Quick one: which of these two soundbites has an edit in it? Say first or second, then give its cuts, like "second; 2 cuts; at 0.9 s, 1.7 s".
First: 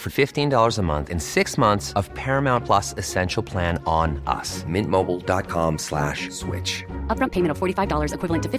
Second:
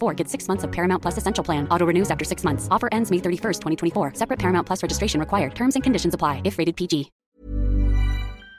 second; 1 cut; at 7.1 s